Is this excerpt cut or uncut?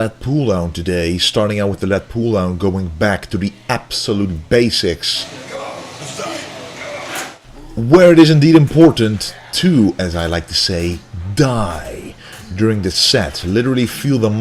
cut